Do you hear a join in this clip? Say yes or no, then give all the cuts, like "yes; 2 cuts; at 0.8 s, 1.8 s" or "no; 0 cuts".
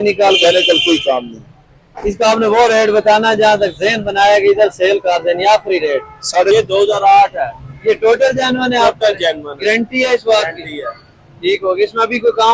yes; 1 cut; at 6.5 s